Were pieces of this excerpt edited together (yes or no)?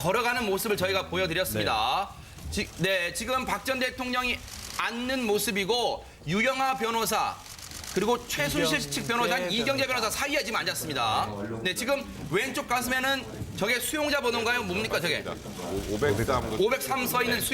yes